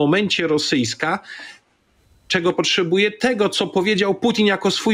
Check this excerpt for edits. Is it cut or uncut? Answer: uncut